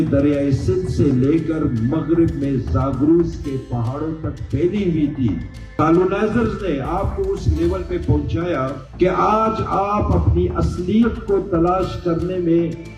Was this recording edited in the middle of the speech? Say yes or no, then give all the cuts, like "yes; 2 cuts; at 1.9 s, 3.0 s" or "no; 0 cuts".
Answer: yes; 2 cuts; at 5.6 s, 8.8 s